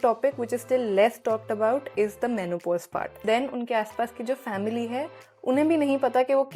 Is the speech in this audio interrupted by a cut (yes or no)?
yes